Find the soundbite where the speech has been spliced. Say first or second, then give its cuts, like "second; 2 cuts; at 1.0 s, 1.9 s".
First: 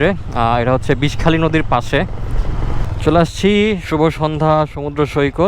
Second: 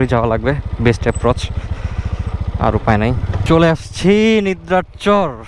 first; 1 cut; at 2.9 s